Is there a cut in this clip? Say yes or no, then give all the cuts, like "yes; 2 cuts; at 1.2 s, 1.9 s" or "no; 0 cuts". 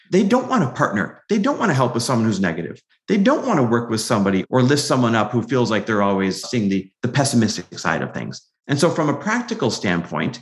yes; 2 cuts; at 4.4 s, 6.4 s